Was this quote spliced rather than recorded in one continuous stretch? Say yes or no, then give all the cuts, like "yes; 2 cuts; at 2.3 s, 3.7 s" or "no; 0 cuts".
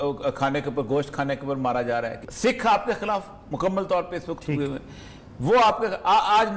yes; 1 cut; at 2.2 s